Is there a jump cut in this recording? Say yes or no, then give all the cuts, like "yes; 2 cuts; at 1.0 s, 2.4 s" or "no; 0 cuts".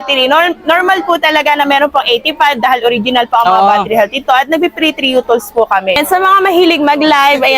yes; 1 cut; at 6.0 s